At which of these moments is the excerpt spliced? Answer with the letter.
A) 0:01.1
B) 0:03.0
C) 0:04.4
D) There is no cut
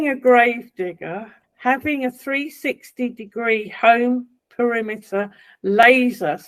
D